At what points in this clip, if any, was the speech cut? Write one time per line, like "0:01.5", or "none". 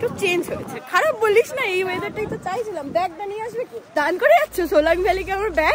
0:03.8